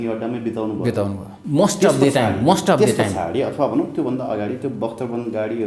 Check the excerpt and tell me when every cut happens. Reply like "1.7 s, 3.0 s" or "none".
1.3 s

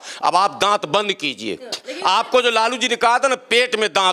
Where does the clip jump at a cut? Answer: none

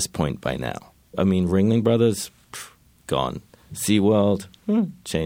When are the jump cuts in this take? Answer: 1.1 s

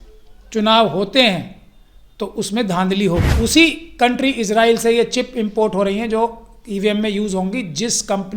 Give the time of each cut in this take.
3.3 s

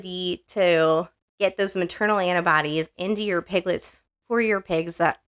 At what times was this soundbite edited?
none

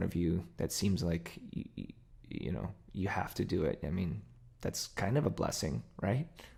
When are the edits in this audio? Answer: none

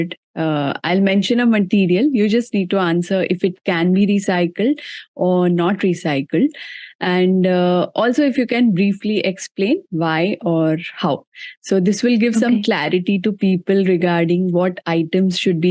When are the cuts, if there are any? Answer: none

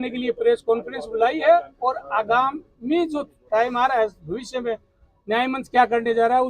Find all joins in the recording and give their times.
none

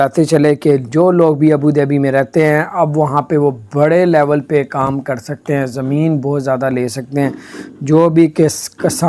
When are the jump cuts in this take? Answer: none

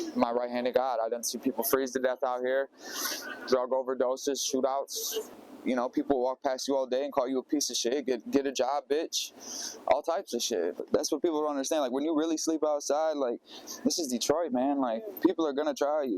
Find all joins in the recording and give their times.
5.2 s, 10.8 s

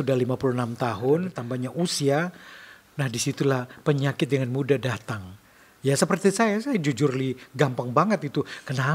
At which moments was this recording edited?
1.4 s

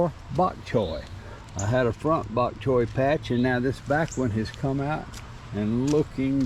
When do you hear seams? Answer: none

